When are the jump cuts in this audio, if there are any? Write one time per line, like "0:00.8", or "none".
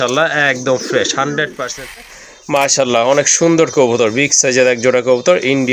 0:02.0